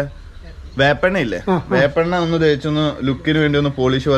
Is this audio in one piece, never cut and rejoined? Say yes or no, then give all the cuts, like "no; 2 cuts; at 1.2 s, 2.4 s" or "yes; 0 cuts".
yes; 0 cuts